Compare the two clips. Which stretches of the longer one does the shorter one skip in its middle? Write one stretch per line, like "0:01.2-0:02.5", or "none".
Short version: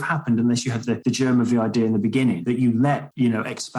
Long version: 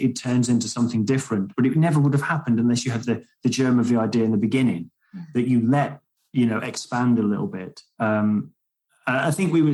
0:03.2-0:03.4
0:05.2-0:06.0